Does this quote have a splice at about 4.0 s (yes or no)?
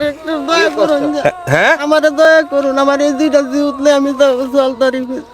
no